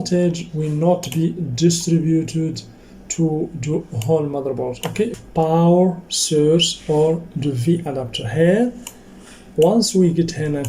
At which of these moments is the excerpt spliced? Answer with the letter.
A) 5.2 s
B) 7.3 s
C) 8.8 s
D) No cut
A